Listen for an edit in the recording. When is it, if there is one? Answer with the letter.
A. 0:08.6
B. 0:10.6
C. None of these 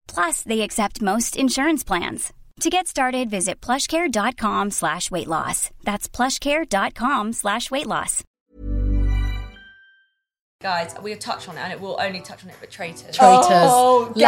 B